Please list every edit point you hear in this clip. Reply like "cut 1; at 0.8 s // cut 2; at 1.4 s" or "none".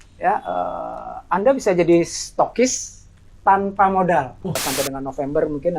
cut 1; at 4.6 s